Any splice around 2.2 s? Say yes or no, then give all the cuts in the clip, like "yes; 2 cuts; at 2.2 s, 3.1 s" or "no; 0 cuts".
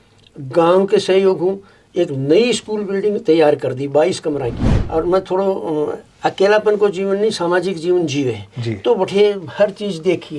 no; 1 cut; at 4.7 s